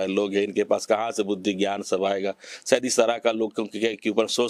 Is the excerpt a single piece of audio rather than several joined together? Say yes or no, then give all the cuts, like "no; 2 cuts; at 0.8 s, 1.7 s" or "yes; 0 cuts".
yes; 0 cuts